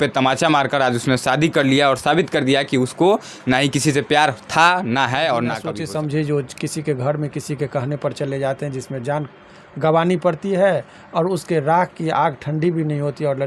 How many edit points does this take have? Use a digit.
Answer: 1